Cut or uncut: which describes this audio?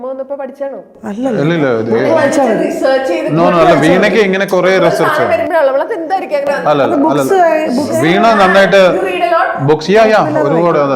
uncut